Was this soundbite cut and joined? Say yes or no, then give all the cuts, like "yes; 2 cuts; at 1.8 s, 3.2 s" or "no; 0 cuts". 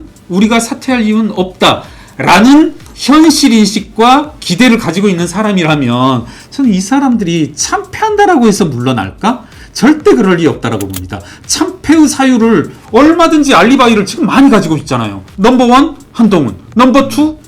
yes; 1 cut; at 15.2 s